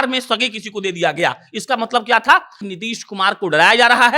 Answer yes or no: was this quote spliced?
yes